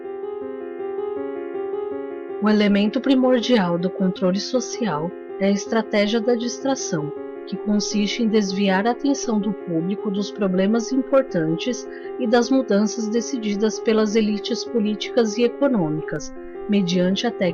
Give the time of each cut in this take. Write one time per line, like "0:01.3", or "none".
0:08.9